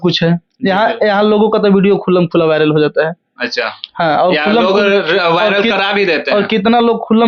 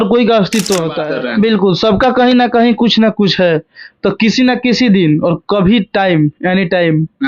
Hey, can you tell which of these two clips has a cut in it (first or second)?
second